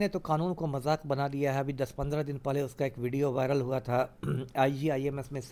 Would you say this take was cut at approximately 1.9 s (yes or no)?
no